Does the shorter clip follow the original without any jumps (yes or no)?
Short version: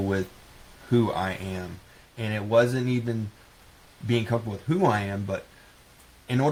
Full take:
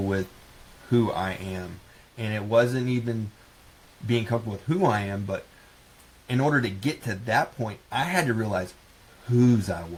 yes